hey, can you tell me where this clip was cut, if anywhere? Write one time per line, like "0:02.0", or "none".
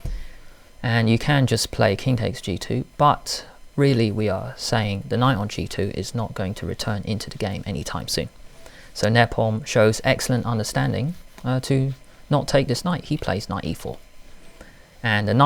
none